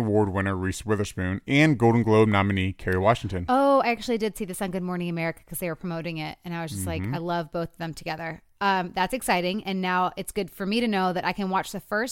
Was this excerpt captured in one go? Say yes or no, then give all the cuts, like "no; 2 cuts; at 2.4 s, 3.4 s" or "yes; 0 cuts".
yes; 0 cuts